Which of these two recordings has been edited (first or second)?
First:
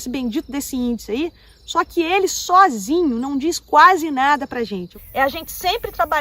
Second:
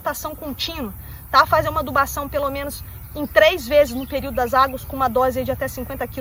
first